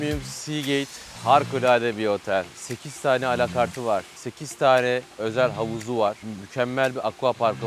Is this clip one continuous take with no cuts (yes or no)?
yes